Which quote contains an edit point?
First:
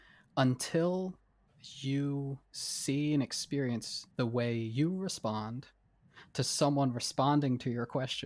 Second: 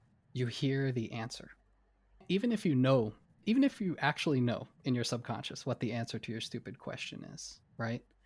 second; 2 cuts; at 2.2 s, 3.3 s

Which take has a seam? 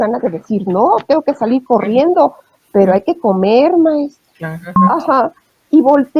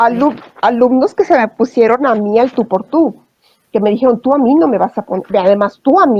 first; 1 cut; at 4.8 s

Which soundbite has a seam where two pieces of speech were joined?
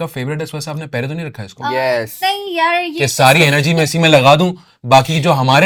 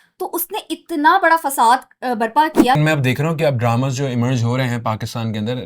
second; 1 cut; at 2.8 s

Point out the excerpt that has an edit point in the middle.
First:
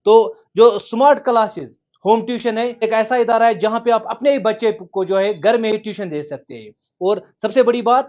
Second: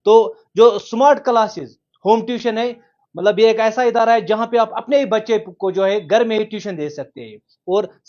first; 1 cut; at 2.8 s

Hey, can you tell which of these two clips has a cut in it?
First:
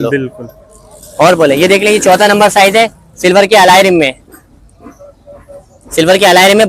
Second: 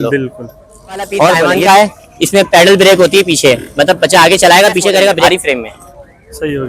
second; 2 cuts; at 1.6 s, 5.3 s

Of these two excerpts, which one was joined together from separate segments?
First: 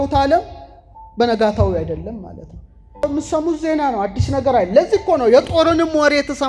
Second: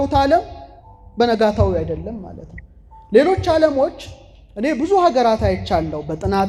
first; 1 cut; at 3.0 s

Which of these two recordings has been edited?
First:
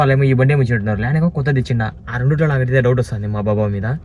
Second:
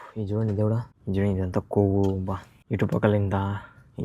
second; 2 cuts; at 0.9 s, 2.5 s

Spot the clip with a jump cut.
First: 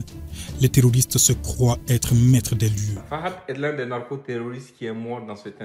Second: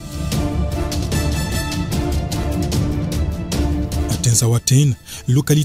first; 1 cut; at 3.0 s

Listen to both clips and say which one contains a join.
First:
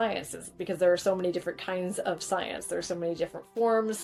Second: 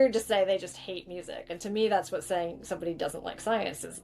second; 1 cut; at 1.5 s

